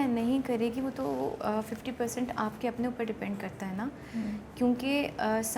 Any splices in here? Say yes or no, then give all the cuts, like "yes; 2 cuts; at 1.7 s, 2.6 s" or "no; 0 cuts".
no; 0 cuts